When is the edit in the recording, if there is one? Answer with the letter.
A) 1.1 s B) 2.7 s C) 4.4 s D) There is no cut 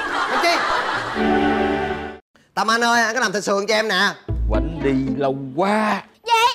A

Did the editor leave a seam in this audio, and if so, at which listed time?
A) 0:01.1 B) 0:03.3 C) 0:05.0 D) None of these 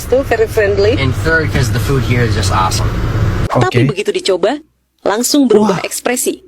B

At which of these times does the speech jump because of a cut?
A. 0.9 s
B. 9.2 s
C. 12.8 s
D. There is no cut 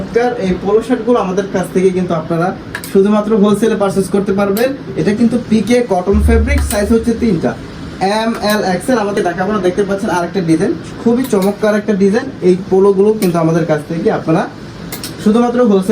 B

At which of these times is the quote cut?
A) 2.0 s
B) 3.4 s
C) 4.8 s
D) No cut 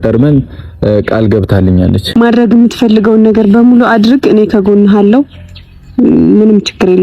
A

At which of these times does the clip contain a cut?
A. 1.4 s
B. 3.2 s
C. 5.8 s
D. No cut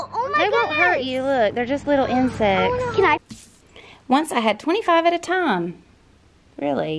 B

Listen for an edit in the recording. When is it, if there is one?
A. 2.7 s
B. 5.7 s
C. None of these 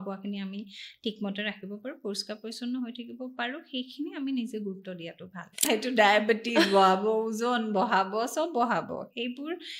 B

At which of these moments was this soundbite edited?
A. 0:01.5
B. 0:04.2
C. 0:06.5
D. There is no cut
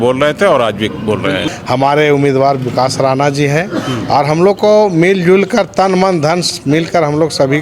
A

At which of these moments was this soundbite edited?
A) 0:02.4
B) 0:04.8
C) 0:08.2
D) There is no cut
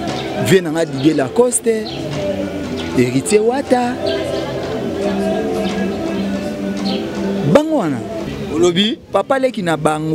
C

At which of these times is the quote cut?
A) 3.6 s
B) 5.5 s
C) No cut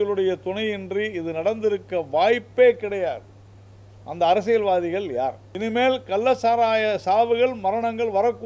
B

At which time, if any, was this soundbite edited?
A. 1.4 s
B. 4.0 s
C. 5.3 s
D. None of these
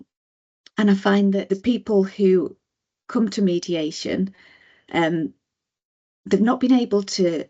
A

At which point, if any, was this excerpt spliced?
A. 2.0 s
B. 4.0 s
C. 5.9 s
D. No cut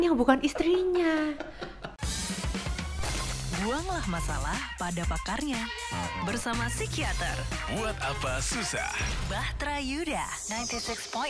A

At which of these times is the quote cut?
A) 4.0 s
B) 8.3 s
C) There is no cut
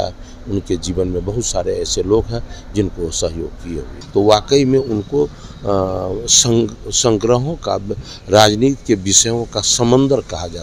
A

